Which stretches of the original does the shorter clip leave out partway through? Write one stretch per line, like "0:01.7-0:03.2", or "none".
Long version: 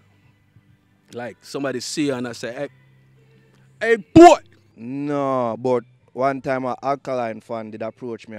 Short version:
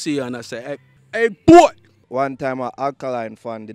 0:02.8-0:03.6
0:04.6-0:06.0

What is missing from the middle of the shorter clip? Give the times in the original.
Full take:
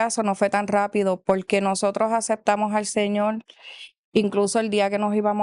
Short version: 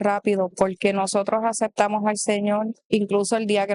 0:03.4-0:04.0

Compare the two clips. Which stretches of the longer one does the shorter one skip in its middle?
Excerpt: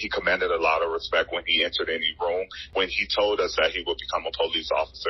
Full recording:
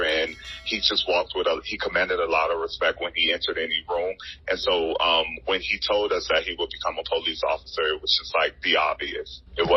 0:04.3-0:05.3

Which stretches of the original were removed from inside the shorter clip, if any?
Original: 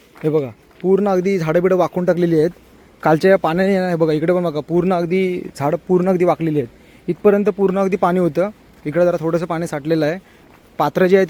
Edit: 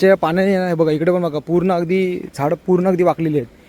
none

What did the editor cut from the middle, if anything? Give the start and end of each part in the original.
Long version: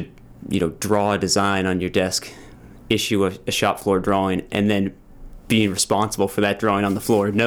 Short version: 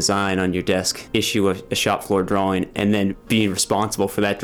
0:02.2-0:02.7
0:05.0-0:05.4

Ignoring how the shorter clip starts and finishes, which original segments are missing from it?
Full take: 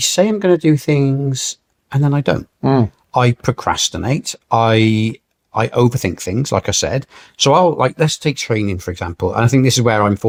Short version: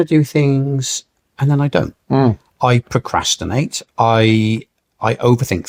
none

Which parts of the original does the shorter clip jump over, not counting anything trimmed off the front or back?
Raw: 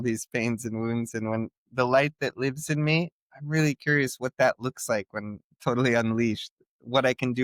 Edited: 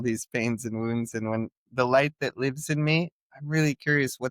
none

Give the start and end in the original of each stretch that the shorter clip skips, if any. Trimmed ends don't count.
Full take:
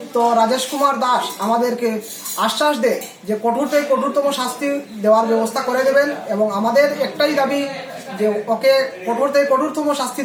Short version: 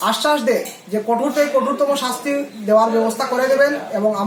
none

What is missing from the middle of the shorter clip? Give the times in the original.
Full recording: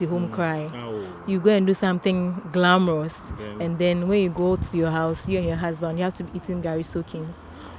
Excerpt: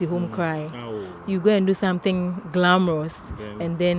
none

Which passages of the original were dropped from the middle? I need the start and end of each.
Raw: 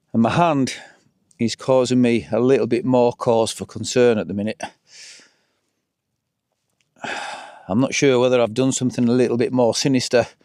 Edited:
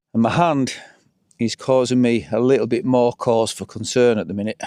none

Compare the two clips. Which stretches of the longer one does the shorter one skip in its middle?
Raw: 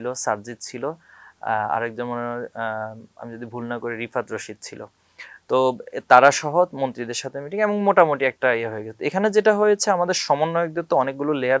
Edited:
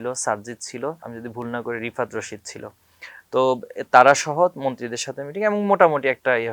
0:01.1-0:03.3

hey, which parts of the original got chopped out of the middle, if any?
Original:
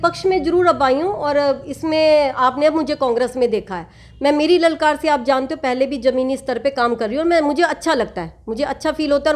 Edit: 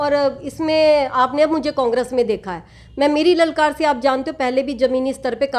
none

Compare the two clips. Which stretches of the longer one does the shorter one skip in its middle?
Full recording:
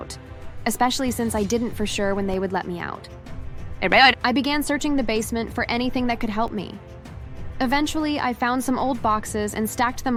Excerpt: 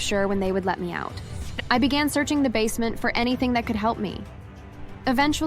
0:03.5-0:04.2

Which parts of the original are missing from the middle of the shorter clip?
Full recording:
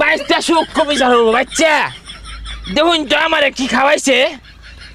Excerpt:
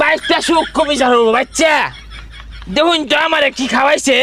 none

